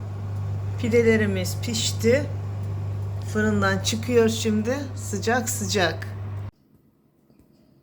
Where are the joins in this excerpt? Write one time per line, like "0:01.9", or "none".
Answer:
0:06.6